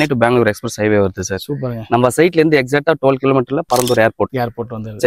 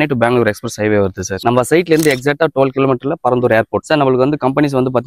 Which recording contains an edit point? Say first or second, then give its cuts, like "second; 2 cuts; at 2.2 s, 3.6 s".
second; 2 cuts; at 1.3 s, 3.8 s